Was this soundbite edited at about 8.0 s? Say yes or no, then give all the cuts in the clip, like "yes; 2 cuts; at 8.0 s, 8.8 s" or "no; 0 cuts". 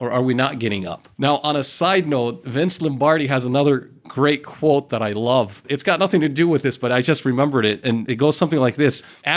yes; 1 cut; at 8.0 s